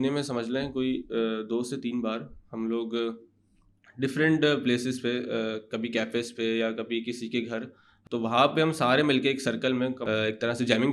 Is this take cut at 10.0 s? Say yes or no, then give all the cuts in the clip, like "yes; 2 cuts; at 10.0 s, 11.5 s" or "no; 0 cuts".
yes; 2 cuts; at 7.9 s, 10.0 s